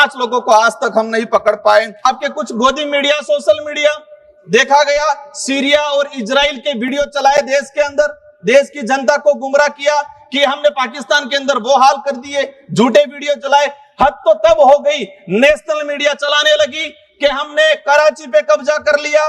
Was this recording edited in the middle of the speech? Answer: yes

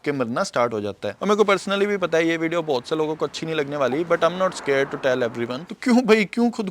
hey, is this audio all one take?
no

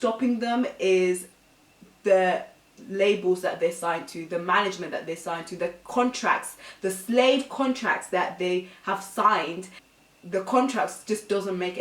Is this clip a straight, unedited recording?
no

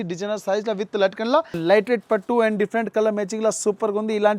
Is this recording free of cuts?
no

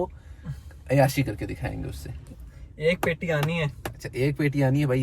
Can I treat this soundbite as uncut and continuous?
no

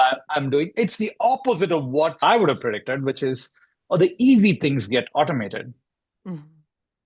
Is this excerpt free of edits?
no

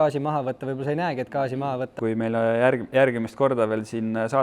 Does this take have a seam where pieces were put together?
yes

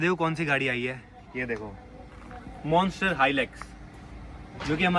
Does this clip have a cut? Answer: no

